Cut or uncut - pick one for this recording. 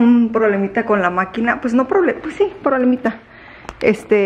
uncut